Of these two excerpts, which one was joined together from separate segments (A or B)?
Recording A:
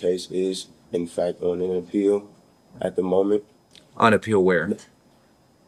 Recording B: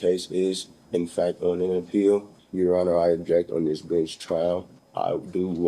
B